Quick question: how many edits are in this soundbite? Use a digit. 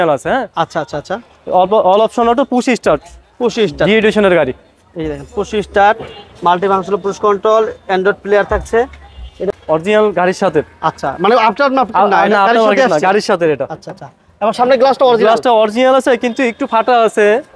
1